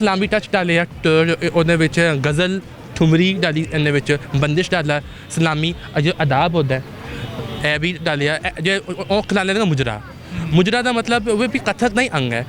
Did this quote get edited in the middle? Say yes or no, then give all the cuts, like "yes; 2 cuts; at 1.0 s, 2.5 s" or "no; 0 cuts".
no; 0 cuts